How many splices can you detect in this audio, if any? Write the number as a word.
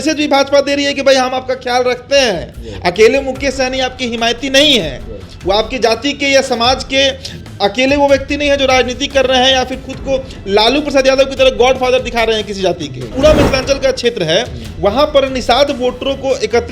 one